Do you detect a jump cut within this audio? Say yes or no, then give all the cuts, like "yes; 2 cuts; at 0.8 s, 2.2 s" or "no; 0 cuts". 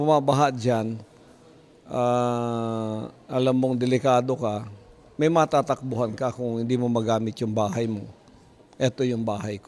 yes; 1 cut; at 1.7 s